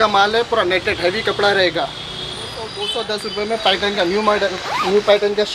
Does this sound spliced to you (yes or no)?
yes